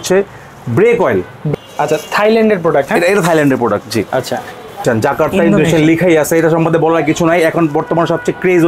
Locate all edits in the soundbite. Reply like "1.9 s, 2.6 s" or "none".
1.4 s, 4.8 s